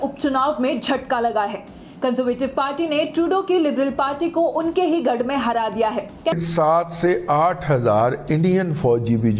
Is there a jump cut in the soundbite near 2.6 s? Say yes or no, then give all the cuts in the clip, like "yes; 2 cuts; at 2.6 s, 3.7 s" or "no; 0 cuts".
no; 1 cut; at 6.3 s